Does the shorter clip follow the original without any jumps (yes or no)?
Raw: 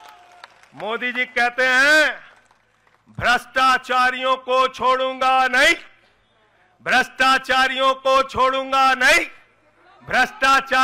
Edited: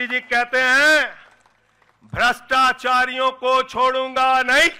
yes